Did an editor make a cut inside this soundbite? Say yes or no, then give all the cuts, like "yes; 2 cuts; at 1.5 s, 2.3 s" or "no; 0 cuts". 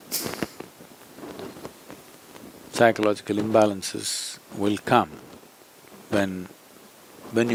no; 0 cuts